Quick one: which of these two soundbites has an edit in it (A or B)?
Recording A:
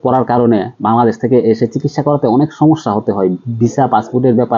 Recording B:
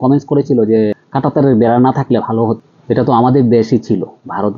B